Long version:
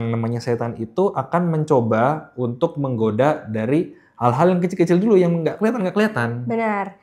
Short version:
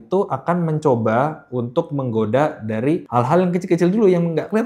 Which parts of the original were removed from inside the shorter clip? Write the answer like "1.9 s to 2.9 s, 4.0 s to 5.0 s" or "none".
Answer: 3.9 s to 4.1 s